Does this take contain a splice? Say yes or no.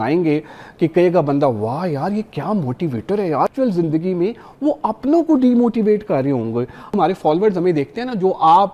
yes